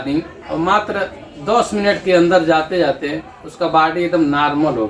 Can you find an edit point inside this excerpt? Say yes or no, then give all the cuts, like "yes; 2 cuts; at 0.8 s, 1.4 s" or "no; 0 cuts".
no; 0 cuts